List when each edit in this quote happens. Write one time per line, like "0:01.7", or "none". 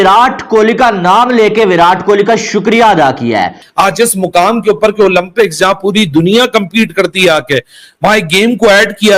0:03.6

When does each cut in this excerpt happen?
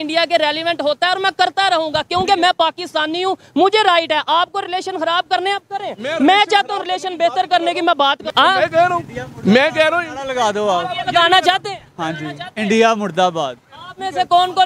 0:08.2

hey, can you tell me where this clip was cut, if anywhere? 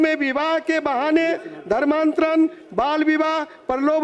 none

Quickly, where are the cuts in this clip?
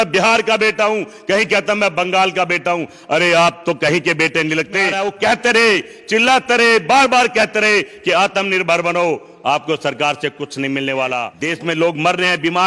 0:04.9
0:11.3

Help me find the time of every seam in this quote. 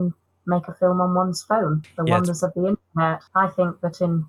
0:01.9
0:03.2

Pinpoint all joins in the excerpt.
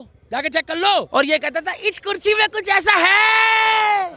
0:01.1

